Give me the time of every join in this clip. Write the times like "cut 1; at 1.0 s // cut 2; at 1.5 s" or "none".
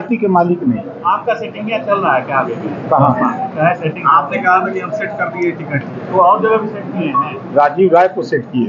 none